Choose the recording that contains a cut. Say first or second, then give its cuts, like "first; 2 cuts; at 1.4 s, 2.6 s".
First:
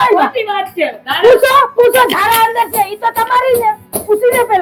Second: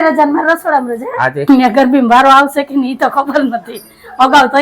second; 1 cut; at 1.4 s